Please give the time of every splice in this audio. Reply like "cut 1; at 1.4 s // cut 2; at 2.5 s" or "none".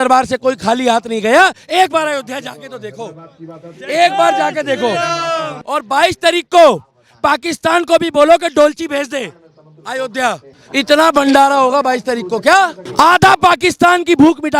cut 1; at 5.5 s // cut 2; at 10.5 s // cut 3; at 12.8 s

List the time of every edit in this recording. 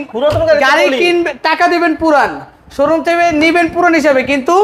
none

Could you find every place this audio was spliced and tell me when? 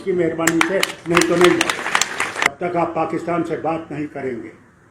cut 1; at 2.5 s

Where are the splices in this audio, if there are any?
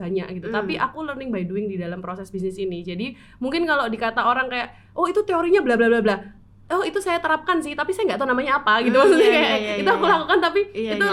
none

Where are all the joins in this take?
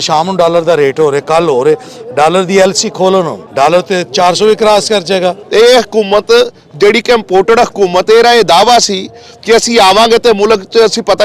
cut 1; at 3.4 s // cut 2; at 5.4 s

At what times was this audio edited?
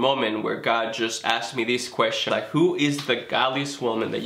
cut 1; at 2.2 s

